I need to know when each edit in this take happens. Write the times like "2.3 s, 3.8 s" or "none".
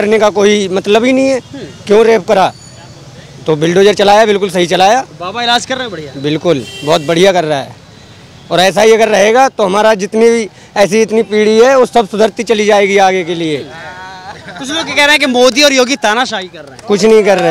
none